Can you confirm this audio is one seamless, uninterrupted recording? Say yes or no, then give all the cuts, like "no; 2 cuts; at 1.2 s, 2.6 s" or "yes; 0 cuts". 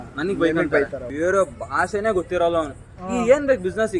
no; 1 cut; at 1.0 s